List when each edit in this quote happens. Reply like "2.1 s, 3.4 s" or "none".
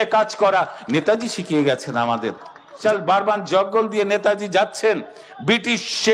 2.7 s